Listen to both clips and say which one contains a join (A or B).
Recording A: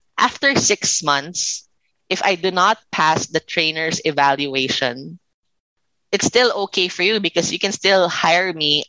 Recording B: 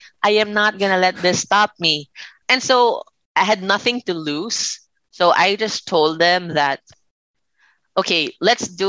B